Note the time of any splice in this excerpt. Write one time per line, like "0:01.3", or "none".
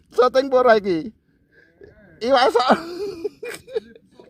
none